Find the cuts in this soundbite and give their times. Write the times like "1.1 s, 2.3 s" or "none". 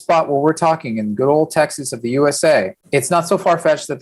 2.8 s

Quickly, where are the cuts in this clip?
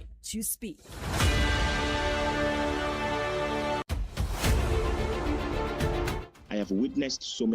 3.9 s

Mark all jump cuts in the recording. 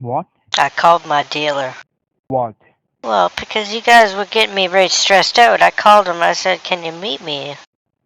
2.3 s

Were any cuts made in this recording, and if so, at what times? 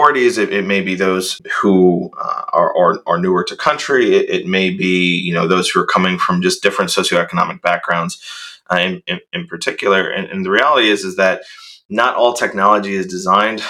1.4 s

